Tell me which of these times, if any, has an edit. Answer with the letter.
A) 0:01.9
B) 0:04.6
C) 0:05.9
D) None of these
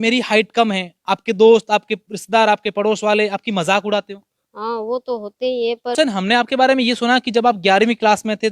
C